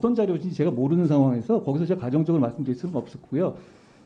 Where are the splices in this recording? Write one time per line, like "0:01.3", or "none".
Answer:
none